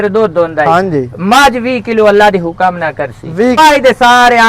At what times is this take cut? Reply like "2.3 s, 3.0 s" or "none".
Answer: 3.6 s